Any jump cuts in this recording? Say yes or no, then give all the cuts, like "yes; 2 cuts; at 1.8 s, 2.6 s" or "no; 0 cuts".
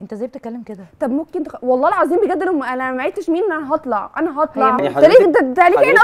yes; 1 cut; at 4.9 s